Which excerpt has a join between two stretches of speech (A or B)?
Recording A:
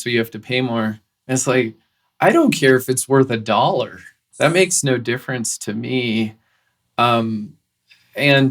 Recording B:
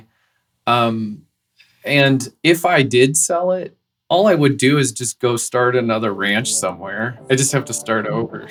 A